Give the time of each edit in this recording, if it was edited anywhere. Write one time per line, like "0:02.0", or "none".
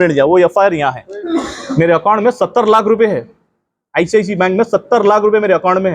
0:01.1